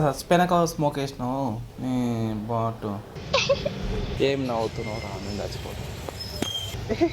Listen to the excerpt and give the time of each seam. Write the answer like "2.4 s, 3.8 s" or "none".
3.1 s, 4.1 s